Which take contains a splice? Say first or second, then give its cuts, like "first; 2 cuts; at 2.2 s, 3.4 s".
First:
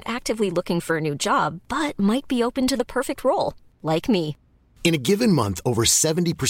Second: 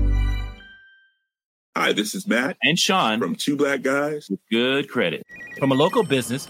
second; 1 cut; at 1.5 s